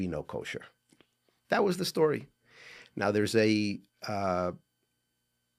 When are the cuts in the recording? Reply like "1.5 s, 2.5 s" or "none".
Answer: none